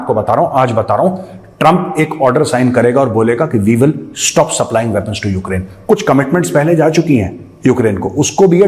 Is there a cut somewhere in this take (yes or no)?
no